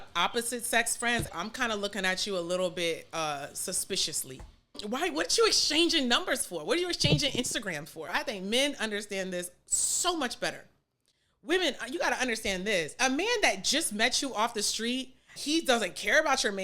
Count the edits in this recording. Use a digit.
5